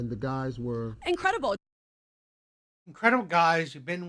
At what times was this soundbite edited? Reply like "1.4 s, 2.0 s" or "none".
none

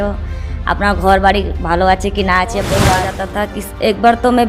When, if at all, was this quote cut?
3.2 s

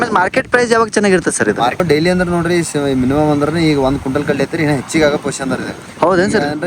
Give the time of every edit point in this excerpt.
1.8 s

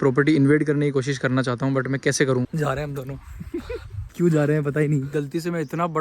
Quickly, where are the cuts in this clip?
2.5 s, 5.1 s

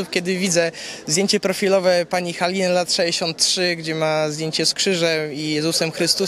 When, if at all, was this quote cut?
none

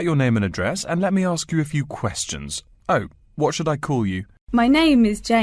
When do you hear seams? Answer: 4.3 s

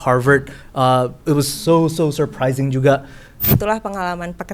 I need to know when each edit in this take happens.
3.4 s

